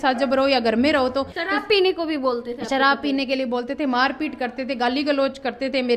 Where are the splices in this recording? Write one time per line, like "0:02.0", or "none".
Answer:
0:01.4